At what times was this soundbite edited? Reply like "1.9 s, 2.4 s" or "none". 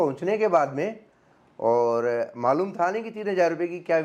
none